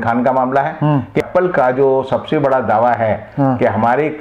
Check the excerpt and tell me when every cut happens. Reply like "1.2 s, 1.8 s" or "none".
1.2 s